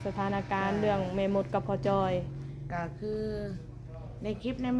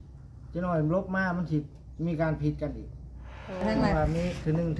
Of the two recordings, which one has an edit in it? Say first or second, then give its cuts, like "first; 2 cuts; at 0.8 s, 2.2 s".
second; 1 cut; at 3.7 s